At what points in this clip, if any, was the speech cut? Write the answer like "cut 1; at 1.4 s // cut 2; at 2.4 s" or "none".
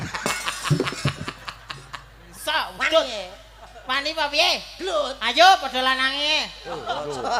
none

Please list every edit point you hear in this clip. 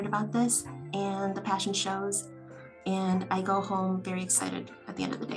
none

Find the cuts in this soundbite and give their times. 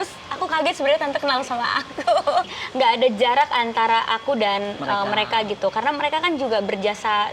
cut 1; at 2.5 s

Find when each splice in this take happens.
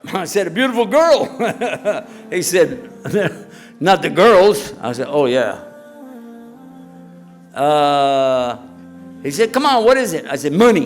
cut 1; at 6.0 s // cut 2; at 7.5 s

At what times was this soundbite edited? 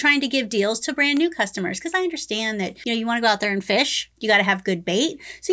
cut 1; at 2.8 s

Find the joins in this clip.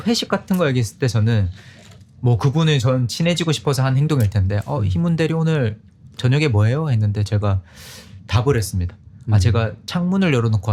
none

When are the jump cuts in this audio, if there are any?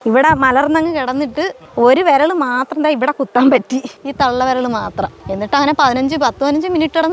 cut 1; at 1.6 s // cut 2; at 4.0 s // cut 3; at 5.2 s

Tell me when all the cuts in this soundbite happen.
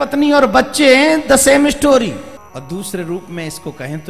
cut 1; at 2.4 s

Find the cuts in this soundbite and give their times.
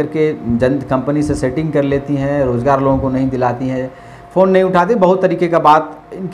none

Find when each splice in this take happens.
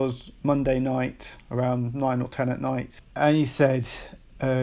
cut 1; at 3.0 s

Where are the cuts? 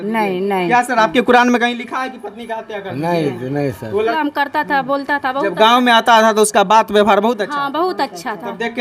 cut 1; at 4.2 s

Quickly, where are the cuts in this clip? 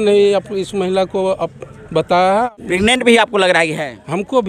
cut 1; at 2.5 s

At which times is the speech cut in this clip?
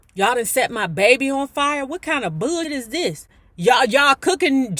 cut 1; at 2.7 s

